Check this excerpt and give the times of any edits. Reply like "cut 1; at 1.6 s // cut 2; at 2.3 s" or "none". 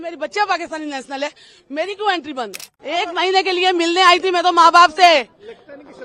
cut 1; at 2.7 s